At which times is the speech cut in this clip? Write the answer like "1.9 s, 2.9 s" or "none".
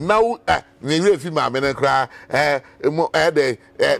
none